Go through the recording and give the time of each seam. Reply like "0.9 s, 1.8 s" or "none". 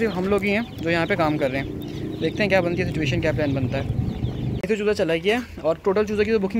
4.5 s